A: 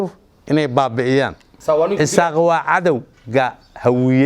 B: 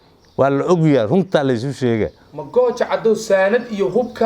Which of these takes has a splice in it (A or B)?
A